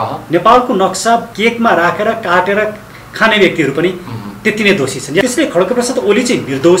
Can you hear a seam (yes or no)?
yes